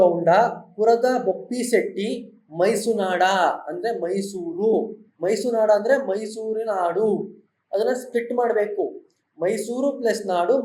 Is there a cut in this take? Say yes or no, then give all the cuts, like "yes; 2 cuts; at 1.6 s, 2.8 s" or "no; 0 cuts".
no; 0 cuts